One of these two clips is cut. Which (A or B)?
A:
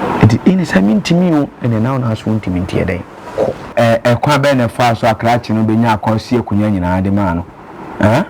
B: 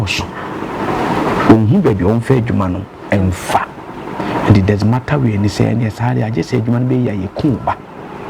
A